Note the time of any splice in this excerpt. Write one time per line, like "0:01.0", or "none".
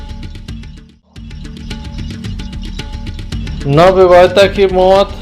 0:01.5